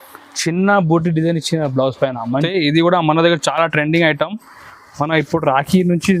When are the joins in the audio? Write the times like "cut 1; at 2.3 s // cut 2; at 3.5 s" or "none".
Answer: cut 1; at 2.5 s